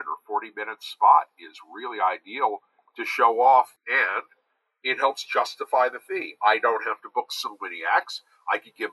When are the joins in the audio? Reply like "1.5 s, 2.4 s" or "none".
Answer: 3.8 s

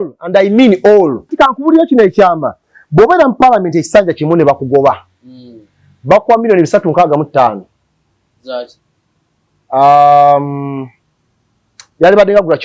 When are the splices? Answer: 1.3 s

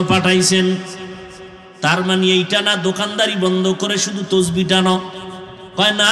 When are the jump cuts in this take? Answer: none

